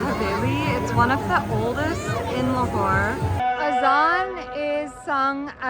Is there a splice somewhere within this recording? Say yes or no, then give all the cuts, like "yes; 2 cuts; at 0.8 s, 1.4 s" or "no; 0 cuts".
yes; 1 cut; at 3.4 s